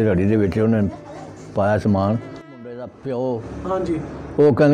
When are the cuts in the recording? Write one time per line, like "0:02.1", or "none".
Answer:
0:02.5